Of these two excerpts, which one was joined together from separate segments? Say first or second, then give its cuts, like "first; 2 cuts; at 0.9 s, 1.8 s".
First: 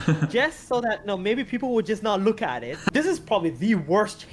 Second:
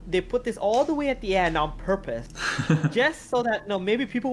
first; 1 cut; at 2.9 s